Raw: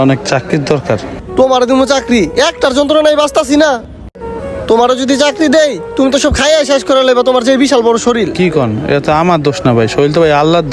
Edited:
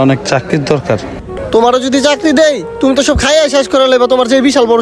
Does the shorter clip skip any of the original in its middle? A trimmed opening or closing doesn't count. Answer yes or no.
yes